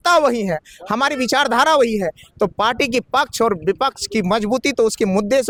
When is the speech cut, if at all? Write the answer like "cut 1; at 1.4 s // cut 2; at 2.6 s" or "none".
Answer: none